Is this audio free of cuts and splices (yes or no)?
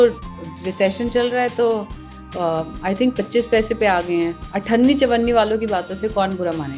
yes